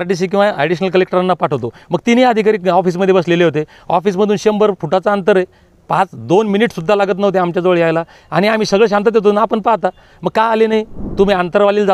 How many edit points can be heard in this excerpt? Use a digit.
1